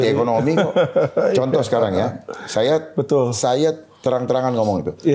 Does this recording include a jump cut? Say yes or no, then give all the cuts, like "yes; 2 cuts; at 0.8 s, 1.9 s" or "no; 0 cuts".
no; 0 cuts